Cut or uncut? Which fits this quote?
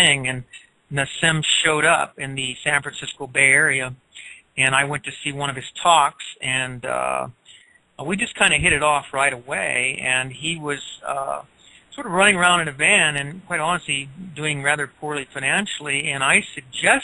cut